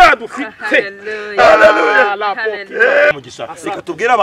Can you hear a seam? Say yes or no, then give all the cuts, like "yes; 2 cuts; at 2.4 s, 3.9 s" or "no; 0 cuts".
yes; 1 cut; at 3.1 s